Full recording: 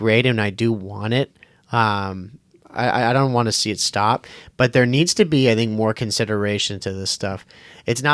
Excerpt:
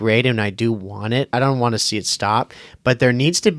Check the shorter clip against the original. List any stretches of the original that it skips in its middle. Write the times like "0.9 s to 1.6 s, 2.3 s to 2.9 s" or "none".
1.3 s to 3.1 s